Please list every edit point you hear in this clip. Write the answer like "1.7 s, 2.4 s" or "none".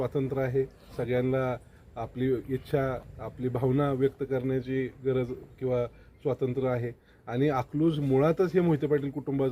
none